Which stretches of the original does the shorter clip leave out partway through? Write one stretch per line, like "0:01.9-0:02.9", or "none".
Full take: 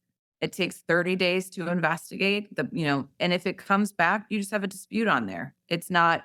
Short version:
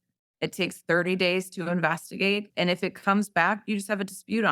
0:02.5-0:03.1